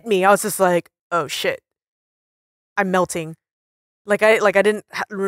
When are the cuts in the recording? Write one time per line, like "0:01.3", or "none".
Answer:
none